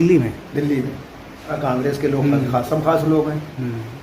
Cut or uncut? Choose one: cut